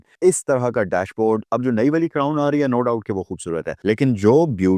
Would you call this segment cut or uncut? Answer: cut